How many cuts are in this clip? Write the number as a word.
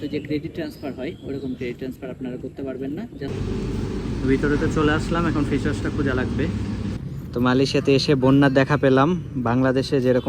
two